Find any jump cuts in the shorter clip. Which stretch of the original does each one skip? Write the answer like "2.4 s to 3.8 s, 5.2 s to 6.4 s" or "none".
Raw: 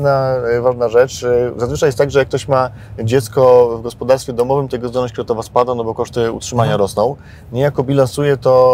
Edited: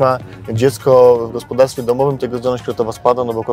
none